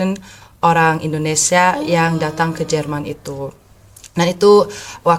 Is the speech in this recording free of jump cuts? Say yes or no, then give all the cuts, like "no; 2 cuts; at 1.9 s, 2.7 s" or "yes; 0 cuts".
yes; 0 cuts